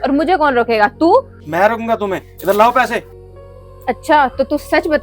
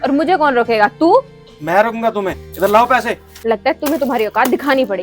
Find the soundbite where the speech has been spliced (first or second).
first